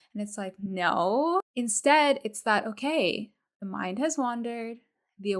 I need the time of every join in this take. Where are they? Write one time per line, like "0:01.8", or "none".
0:01.5